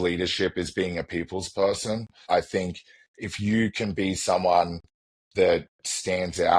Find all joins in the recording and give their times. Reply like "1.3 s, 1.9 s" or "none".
2.3 s